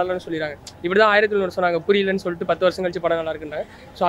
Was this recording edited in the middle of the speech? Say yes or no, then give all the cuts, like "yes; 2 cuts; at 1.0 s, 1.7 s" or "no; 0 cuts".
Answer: no; 0 cuts